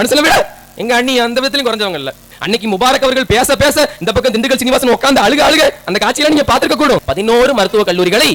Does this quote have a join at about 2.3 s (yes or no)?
yes